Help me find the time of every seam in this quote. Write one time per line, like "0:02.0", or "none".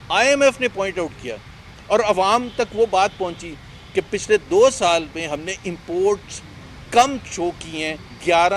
none